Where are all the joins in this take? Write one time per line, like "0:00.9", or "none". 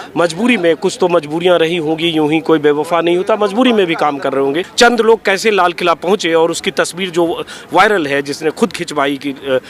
0:04.7